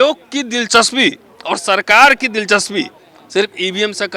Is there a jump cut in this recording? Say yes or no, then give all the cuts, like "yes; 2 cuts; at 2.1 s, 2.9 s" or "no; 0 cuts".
no; 0 cuts